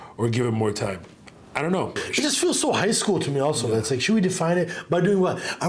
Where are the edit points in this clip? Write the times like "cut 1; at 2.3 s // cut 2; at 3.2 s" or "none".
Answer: cut 1; at 2.0 s